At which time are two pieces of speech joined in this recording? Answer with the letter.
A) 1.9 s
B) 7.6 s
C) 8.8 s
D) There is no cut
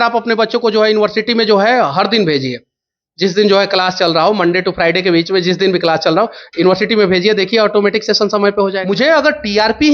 C